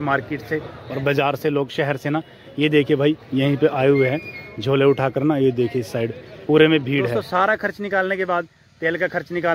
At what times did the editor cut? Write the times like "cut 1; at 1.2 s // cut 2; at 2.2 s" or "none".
cut 1; at 7.1 s